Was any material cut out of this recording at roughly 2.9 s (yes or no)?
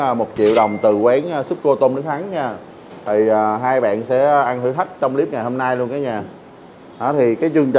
no